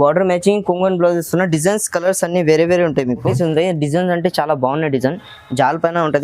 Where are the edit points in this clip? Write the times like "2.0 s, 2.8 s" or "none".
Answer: 3.3 s